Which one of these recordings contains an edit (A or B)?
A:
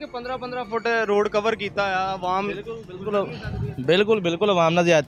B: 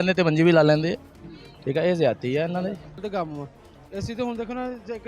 B